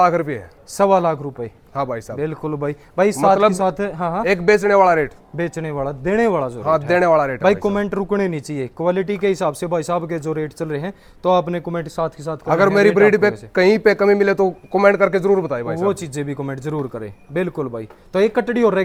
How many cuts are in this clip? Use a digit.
0